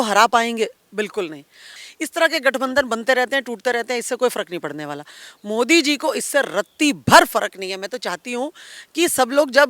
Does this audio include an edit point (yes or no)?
yes